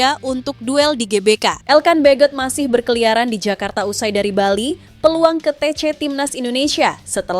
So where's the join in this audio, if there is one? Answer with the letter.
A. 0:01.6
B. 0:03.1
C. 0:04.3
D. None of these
A